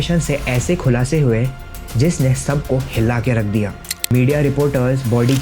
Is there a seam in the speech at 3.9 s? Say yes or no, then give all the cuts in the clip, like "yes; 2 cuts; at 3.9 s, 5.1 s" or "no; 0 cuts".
yes; 1 cut; at 3.9 s